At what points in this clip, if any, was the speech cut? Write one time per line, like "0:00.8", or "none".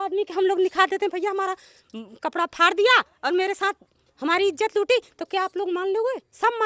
none